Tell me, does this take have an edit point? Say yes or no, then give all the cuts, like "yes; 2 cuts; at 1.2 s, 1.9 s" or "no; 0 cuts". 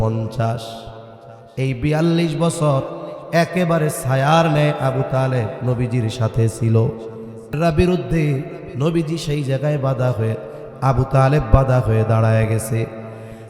yes; 1 cut; at 7.5 s